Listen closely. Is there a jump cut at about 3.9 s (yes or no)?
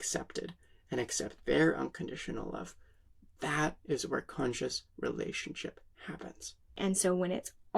no